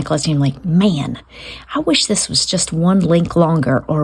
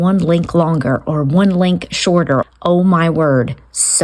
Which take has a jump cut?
second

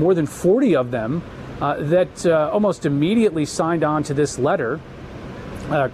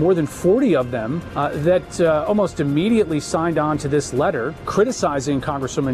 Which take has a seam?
second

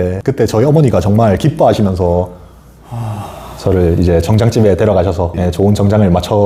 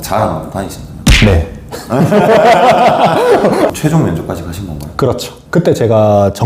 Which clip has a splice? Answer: second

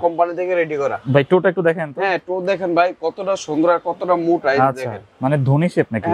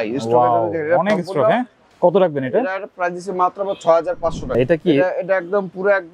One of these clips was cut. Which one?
second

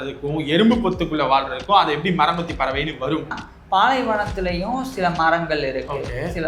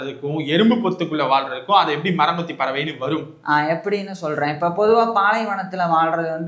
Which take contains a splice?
first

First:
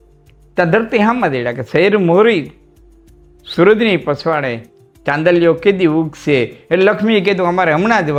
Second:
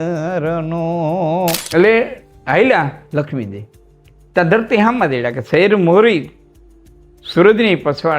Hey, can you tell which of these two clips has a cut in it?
second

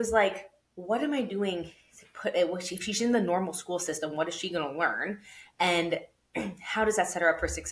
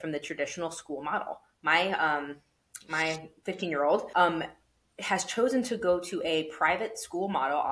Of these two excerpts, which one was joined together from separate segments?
second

